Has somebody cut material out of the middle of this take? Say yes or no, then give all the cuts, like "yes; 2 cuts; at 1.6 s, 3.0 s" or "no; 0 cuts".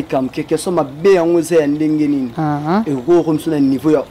no; 0 cuts